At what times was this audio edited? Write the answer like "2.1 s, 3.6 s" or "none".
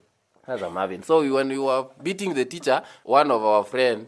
2.9 s

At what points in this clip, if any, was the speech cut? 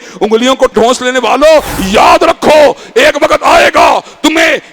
1.7 s

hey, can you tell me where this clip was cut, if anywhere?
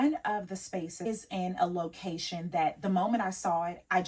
1.0 s

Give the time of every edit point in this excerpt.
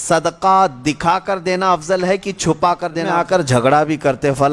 3.1 s

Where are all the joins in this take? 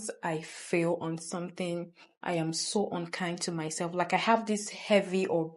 none

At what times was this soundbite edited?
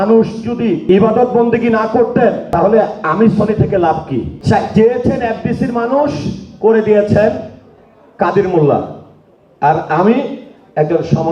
0.8 s, 2.4 s, 4.3 s

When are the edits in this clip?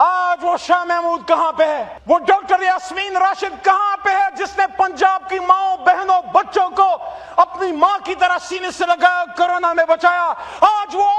1.9 s

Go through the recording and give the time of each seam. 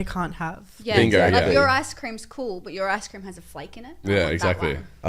none

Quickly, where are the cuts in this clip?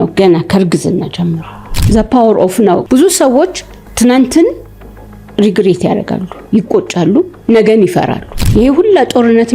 1.8 s, 8.2 s

